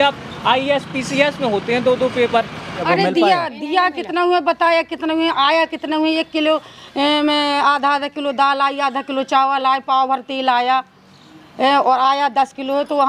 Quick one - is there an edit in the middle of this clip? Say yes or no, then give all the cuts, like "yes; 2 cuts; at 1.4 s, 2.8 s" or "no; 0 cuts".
yes; 1 cut; at 2.8 s